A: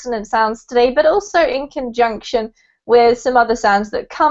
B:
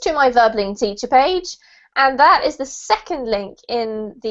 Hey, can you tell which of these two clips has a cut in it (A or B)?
B